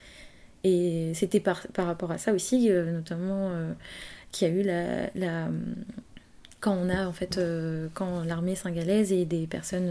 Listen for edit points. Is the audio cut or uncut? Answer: uncut